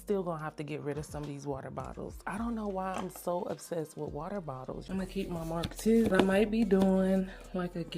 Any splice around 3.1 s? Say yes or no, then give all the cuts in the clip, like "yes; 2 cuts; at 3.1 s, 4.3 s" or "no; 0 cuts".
no; 2 cuts; at 4.8 s, 6.1 s